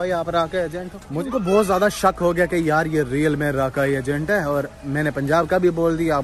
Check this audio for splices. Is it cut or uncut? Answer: cut